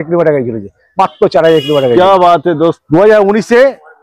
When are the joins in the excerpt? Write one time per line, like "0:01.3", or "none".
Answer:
0:02.8